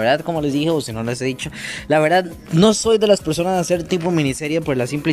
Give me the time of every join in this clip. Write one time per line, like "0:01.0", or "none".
none